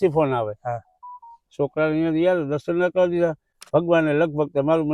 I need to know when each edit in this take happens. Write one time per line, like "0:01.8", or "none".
0:03.5